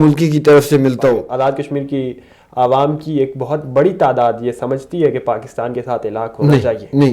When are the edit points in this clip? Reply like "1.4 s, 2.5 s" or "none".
1.3 s